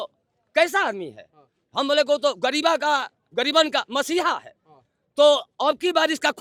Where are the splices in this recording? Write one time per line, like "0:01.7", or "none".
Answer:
none

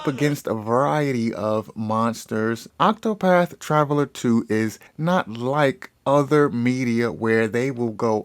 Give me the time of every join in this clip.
0:02.7

